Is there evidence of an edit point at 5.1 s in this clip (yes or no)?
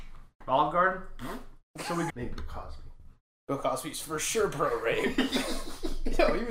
no